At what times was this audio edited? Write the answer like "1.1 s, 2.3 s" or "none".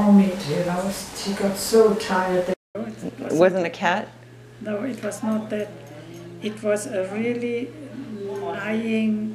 2.6 s

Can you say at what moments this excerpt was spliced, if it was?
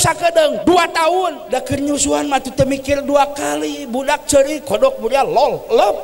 1.4 s

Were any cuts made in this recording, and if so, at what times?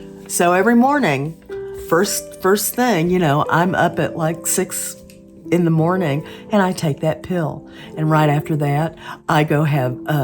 none

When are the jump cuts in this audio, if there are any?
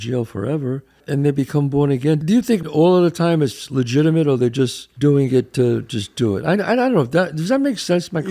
1.0 s, 2.7 s, 4.8 s

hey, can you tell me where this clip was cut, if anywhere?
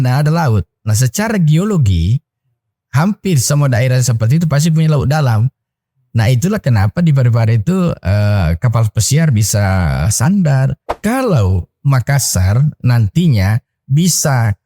10.8 s

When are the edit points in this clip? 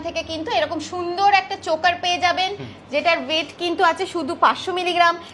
none

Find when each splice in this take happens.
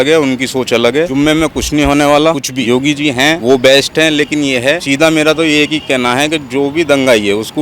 1.1 s, 2.8 s, 4.8 s

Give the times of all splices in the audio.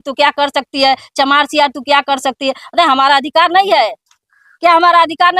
none

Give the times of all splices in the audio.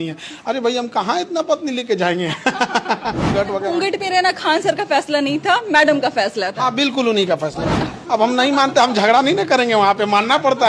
3.3 s, 7.8 s

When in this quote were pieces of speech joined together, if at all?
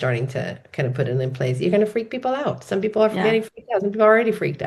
none

